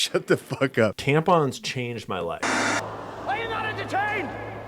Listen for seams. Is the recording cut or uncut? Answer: cut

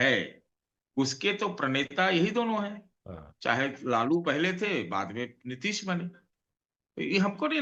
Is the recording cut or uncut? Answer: uncut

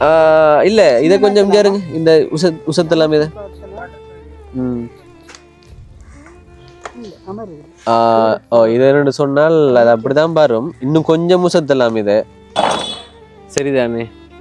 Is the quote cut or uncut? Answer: cut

